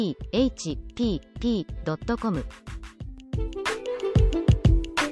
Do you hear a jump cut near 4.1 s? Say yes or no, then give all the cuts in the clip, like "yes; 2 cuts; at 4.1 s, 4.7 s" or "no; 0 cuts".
no; 1 cut; at 2.3 s